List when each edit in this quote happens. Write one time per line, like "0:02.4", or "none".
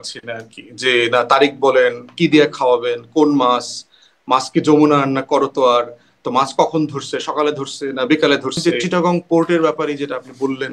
0:08.6